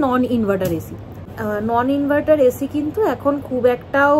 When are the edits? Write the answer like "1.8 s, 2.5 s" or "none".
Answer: 1.3 s